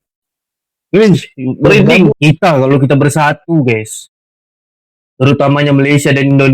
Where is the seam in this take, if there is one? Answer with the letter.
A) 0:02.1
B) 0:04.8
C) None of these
A